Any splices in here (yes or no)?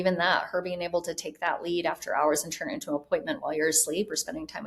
no